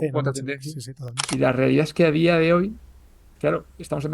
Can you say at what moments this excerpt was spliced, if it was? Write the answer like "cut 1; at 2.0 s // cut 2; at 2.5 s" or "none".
cut 1; at 1.2 s

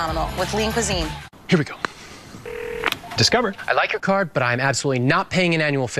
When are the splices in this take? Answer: cut 1; at 1.3 s

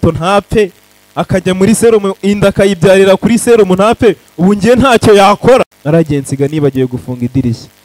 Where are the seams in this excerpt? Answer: cut 1; at 5.8 s

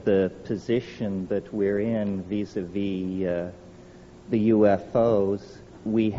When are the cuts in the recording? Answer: cut 1; at 2.2 s

